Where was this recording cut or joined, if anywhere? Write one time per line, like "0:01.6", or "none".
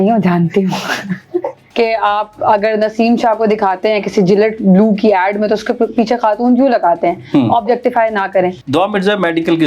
0:01.6
0:08.6